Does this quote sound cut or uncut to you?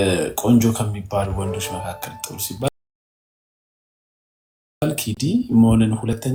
uncut